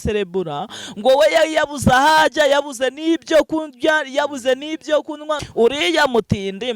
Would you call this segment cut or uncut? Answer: cut